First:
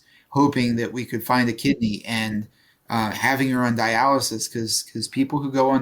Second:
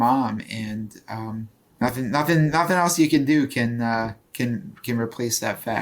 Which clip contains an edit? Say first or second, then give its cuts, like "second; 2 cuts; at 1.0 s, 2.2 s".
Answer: second; 1 cut; at 1.6 s